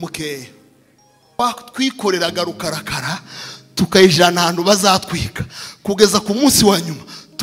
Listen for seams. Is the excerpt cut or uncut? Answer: cut